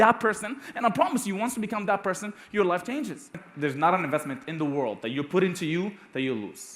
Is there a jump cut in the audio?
yes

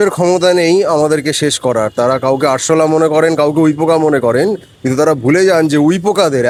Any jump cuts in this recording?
no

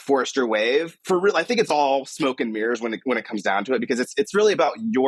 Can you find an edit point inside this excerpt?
no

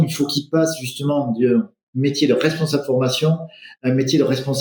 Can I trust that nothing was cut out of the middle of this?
yes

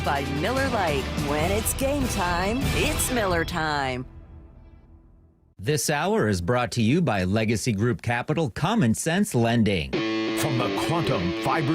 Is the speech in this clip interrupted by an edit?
yes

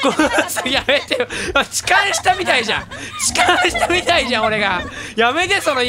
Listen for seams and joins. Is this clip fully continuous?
yes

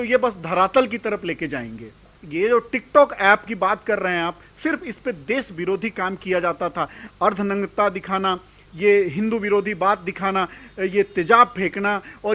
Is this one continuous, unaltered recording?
no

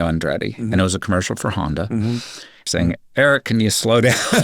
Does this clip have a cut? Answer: yes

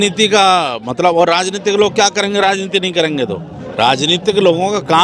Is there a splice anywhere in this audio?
no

